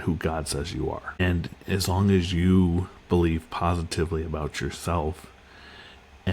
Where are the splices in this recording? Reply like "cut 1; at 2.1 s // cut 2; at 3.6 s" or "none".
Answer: cut 1; at 1.2 s